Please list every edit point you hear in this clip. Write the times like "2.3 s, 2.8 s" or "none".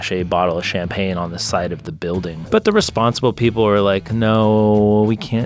2.5 s